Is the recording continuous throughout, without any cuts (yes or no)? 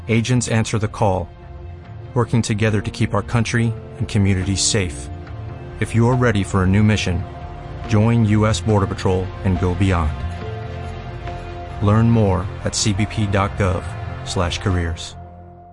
yes